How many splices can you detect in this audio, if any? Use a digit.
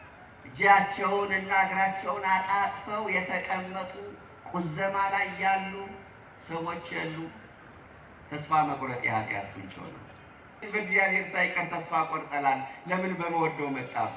1